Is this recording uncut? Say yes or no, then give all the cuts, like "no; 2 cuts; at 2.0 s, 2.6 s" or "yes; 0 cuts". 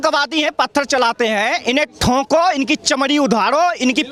yes; 0 cuts